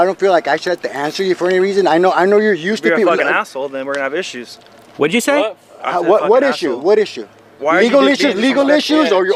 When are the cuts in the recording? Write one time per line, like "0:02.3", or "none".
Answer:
none